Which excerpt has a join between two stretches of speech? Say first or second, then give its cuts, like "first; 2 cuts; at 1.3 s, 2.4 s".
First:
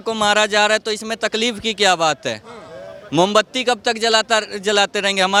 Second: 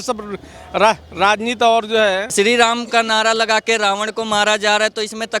second; 1 cut; at 2.3 s